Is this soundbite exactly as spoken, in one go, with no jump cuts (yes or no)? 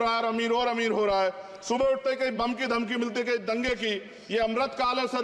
yes